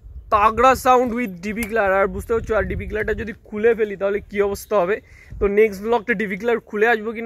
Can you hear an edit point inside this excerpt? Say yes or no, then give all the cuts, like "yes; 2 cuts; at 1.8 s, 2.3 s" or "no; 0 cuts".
no; 0 cuts